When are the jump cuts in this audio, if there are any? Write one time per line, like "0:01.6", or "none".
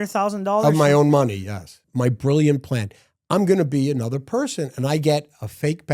0:01.8